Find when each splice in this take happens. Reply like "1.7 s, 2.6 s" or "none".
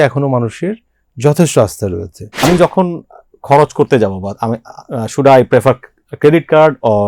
2.4 s